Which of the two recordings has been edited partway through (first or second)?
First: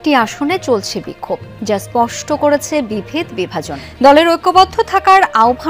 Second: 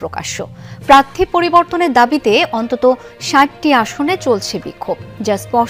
first